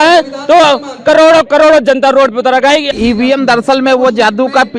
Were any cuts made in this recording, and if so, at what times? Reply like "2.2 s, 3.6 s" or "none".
2.9 s